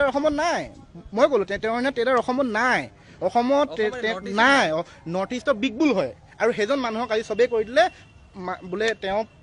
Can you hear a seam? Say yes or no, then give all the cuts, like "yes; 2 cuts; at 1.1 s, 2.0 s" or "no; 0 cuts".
no; 0 cuts